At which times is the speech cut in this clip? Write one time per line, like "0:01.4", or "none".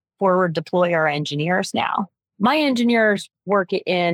0:02.2